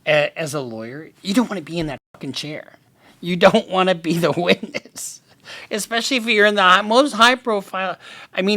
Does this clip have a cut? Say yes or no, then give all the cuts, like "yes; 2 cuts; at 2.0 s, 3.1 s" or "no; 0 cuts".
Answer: no; 0 cuts